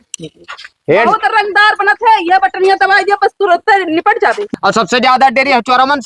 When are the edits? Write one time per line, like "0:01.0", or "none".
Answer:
0:04.4